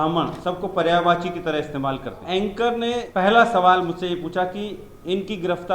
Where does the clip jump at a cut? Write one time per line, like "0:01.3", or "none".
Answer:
0:02.2
0:03.1